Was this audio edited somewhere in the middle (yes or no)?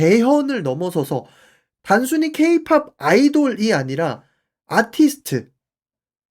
yes